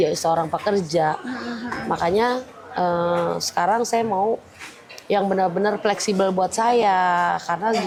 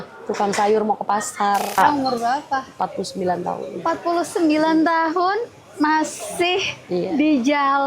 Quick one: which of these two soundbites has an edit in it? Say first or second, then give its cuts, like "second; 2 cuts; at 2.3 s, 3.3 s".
second; 1 cut; at 1.8 s